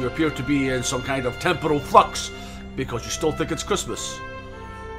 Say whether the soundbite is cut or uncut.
uncut